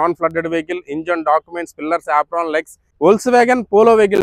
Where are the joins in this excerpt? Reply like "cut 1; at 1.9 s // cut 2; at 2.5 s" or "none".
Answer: cut 1; at 2.8 s